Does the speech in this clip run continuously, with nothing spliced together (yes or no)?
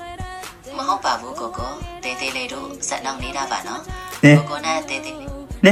yes